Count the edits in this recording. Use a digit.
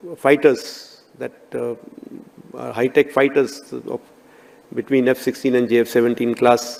0